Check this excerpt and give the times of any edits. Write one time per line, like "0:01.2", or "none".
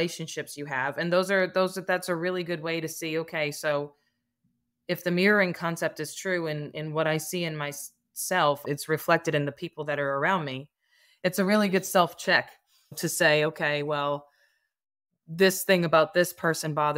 0:08.6
0:12.9